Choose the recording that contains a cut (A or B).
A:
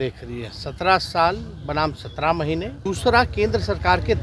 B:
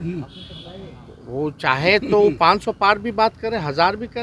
A